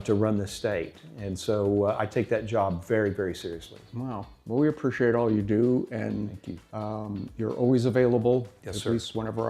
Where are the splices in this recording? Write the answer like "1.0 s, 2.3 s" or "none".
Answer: none